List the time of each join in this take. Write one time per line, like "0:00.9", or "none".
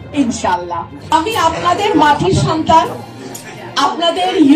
0:00.9